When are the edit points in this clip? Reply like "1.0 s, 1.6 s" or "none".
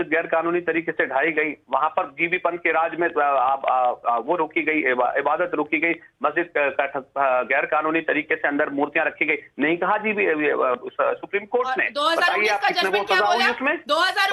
none